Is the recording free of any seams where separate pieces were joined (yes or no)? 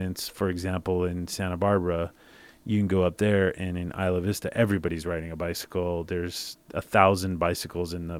yes